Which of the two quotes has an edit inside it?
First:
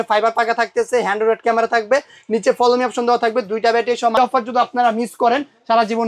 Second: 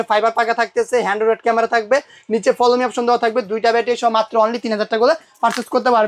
first; 1 cut; at 4.2 s

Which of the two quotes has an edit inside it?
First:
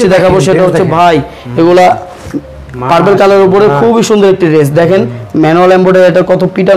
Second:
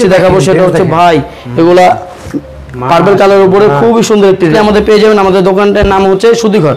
second; 1 cut; at 4.5 s

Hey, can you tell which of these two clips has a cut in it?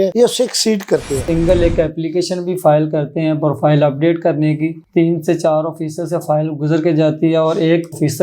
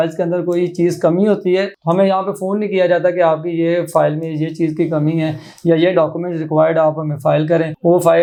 first; 2 cuts; at 1.2 s, 4.8 s

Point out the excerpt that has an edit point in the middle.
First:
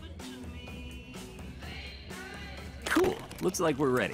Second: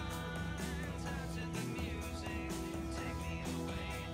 first; 1 cut; at 3.0 s

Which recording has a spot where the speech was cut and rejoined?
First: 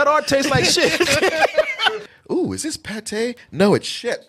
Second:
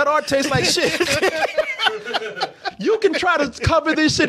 first; 1 cut; at 2.0 s

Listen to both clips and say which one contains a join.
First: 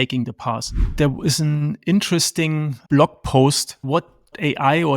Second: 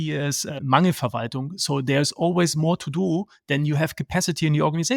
first; 2 cuts; at 0.9 s, 3.8 s

